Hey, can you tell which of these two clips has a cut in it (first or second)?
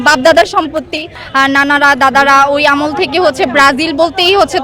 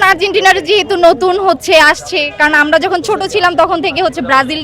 first